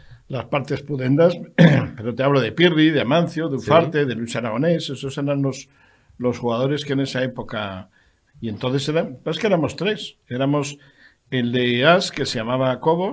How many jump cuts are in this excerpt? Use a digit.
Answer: 0